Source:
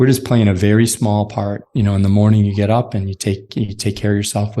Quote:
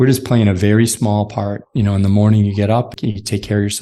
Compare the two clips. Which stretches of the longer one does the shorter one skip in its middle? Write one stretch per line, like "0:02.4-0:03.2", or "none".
0:02.9-0:03.4

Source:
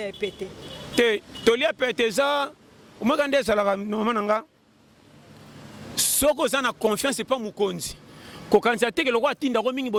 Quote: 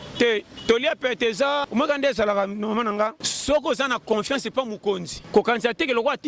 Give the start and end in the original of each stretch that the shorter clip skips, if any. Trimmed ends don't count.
0:02.4-0:03.0
0:04.6-0:06.0
0:07.9-0:08.3

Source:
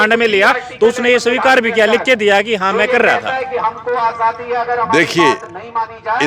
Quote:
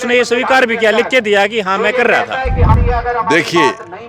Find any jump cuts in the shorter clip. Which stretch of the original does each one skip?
0:03.8-0:04.4

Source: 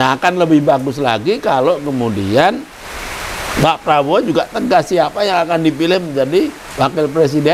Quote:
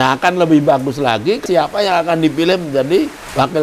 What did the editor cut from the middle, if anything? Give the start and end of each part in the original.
0:01.4-0:04.9

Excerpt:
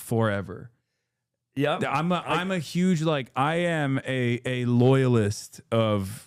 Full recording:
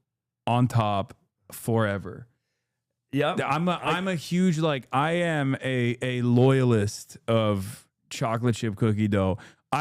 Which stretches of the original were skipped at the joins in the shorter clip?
none

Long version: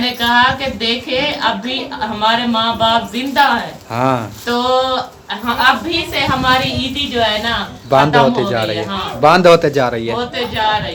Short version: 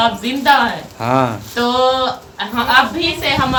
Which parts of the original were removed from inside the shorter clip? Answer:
none

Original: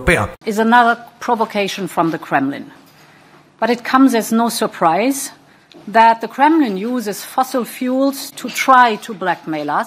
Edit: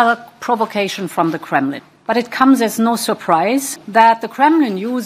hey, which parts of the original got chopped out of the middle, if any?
0:02.7-0:03.4
0:05.3-0:05.8

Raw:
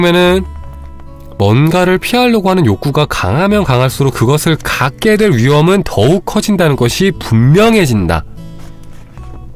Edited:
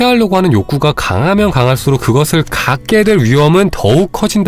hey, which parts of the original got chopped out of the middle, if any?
none

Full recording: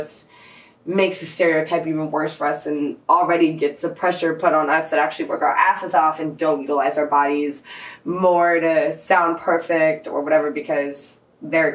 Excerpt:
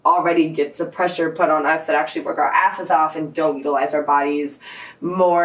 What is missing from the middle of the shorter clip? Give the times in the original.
none

